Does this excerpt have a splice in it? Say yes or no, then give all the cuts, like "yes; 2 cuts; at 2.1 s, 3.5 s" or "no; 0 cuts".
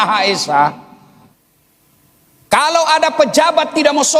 yes; 1 cut; at 1.3 s